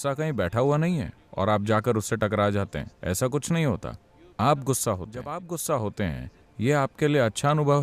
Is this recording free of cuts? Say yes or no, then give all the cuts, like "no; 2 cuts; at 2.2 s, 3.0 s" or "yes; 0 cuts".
no; 1 cut; at 5.4 s